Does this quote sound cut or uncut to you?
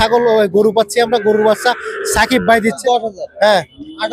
cut